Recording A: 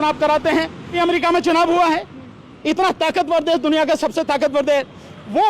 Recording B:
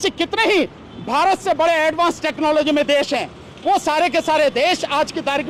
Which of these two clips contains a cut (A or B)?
A